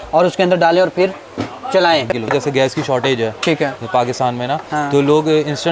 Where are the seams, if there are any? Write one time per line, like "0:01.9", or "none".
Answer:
0:02.2